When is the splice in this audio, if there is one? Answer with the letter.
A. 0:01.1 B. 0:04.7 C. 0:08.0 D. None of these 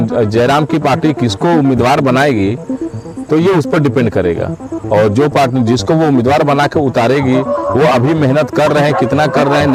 D